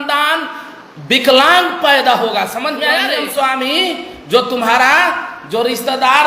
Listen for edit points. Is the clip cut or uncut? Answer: cut